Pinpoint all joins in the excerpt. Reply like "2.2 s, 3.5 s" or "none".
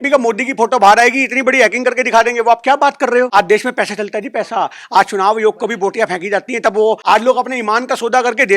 3.3 s, 7.0 s